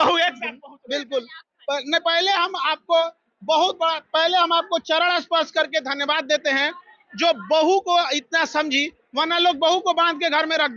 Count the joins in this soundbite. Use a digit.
0